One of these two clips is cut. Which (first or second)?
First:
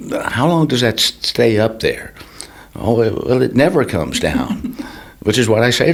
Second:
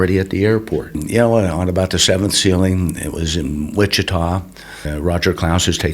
second